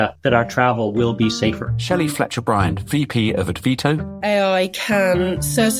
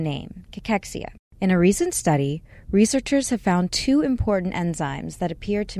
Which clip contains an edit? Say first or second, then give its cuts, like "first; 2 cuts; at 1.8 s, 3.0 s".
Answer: second; 1 cut; at 1.2 s